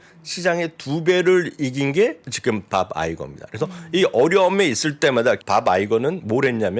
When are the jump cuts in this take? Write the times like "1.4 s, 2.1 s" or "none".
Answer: 2.3 s, 5.4 s